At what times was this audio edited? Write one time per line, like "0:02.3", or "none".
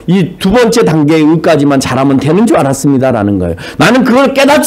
0:03.7